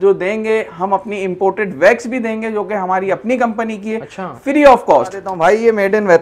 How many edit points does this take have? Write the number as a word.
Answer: one